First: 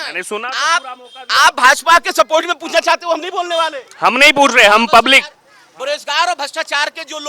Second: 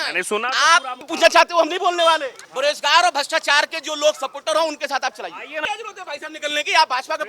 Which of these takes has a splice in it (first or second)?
second